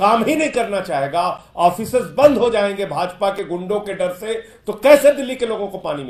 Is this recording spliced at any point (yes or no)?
no